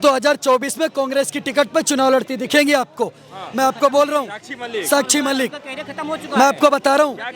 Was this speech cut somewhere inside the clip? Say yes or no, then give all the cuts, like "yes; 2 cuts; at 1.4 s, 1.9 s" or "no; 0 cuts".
no; 0 cuts